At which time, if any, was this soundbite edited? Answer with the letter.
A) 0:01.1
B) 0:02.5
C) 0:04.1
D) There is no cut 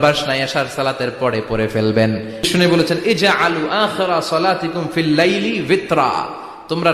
B